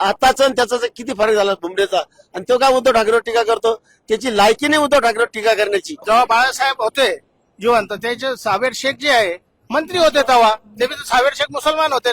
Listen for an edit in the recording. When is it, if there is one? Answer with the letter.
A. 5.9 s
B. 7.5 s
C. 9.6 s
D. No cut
A